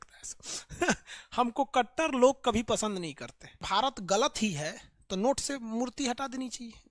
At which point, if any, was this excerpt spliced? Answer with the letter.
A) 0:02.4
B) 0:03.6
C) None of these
B